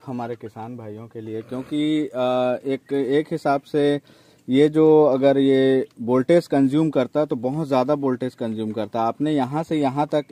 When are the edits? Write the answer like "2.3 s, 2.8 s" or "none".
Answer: none